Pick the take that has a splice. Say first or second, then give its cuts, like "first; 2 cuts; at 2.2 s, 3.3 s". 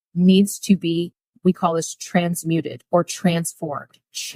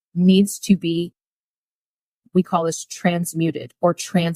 first; 1 cut; at 1.2 s